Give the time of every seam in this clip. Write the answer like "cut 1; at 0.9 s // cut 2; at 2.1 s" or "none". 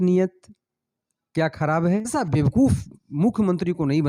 cut 1; at 2.1 s